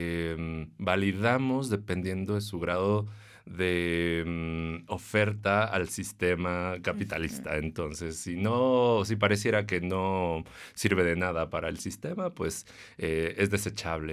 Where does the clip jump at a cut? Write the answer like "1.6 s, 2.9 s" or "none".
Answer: none